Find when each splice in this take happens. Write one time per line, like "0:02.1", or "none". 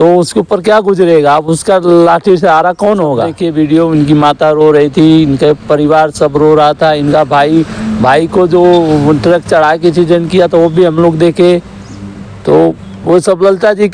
0:03.4

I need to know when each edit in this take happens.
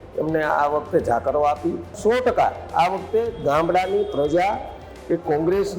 0:01.9

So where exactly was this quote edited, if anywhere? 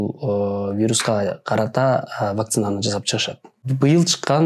0:03.6

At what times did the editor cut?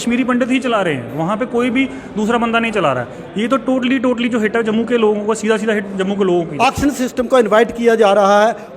0:06.5

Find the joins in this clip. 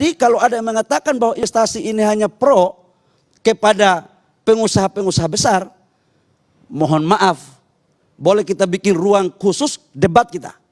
0:01.5

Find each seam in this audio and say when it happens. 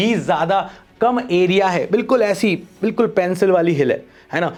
none

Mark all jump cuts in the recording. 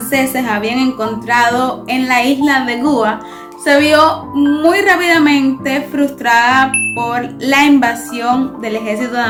none

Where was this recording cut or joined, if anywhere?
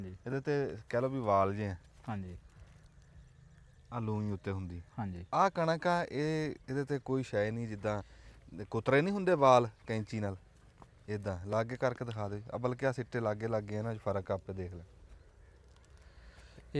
none

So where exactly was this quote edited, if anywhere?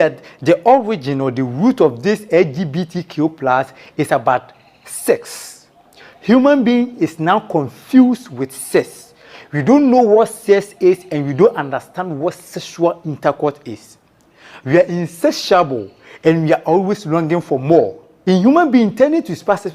0:18.1

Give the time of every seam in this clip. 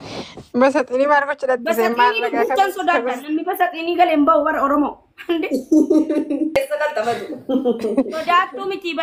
0:06.6

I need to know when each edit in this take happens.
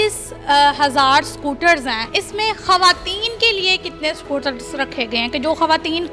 0:02.0

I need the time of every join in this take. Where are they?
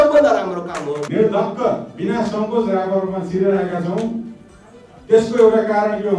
0:01.0

